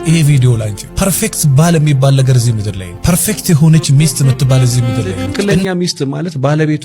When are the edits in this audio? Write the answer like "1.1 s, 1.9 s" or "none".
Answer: 5.5 s